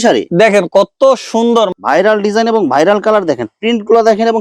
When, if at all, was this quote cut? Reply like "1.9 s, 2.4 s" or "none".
1.7 s